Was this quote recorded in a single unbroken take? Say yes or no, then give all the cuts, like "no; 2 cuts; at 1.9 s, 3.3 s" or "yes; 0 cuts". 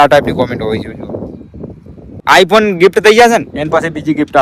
no; 1 cut; at 2.2 s